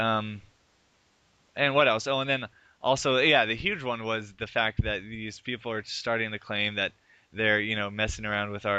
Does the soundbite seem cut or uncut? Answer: uncut